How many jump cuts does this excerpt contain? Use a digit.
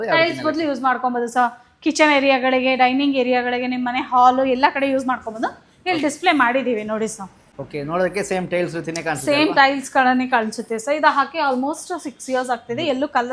0